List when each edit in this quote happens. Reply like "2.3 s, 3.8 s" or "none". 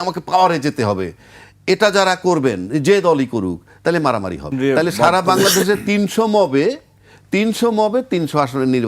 4.5 s